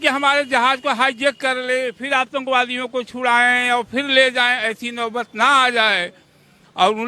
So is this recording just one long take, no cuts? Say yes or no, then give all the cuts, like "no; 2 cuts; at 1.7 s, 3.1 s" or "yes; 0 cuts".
yes; 0 cuts